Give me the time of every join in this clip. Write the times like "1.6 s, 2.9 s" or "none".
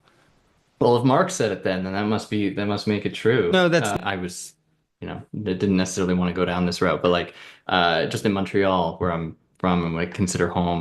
4.0 s